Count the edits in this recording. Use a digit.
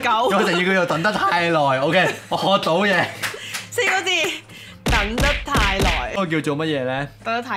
1